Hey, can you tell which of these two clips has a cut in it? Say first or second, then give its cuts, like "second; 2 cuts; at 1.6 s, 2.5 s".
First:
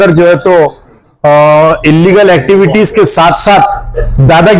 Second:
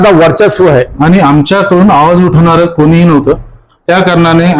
second; 1 cut; at 0.9 s